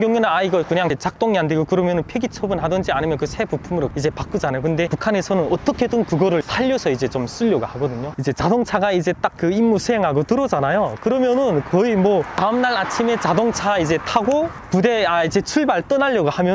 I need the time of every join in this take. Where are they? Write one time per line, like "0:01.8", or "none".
0:01.0
0:03.9
0:05.0
0:06.4
0:08.1
0:12.4
0:14.6